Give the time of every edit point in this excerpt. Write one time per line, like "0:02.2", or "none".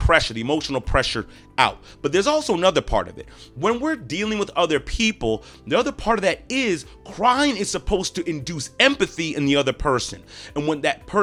none